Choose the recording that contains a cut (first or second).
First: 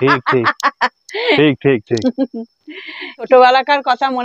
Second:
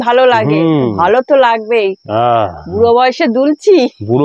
first